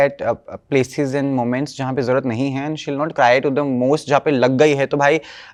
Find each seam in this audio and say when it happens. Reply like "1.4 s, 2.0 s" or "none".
none

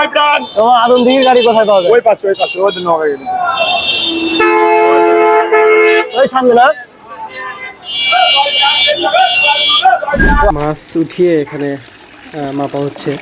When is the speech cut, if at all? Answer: 10.5 s

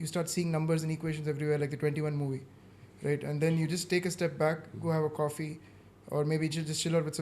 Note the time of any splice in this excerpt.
none

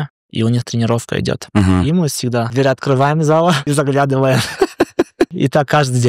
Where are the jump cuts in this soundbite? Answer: 2.5 s, 3.6 s, 5.3 s

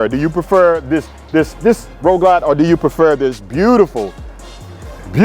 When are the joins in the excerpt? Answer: none

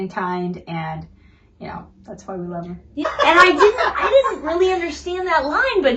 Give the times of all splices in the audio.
3.1 s

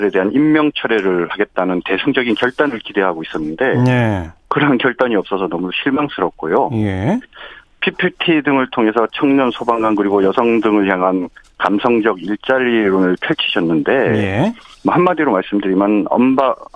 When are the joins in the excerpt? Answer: none

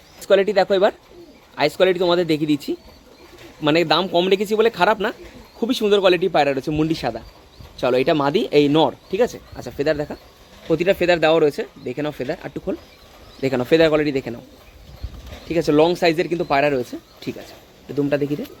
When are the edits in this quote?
none

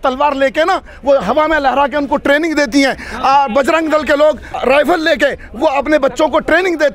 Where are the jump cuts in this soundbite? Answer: 4.6 s

